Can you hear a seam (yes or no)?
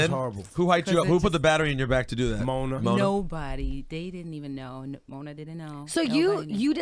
yes